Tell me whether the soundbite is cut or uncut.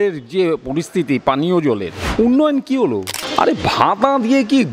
cut